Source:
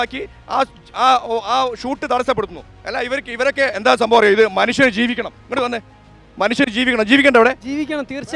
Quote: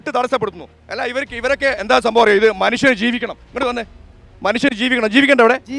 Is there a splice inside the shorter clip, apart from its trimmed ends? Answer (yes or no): no